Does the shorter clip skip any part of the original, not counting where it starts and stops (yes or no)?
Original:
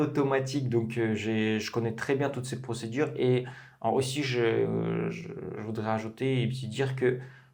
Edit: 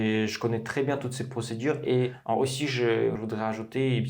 yes